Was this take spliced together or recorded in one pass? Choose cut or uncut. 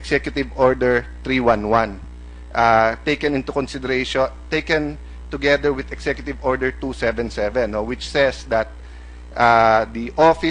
cut